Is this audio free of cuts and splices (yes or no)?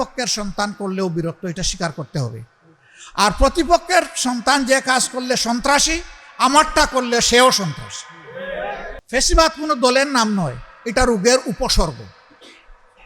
no